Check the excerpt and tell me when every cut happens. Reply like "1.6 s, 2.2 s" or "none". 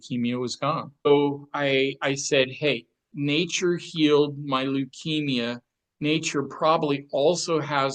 1.1 s, 3.0 s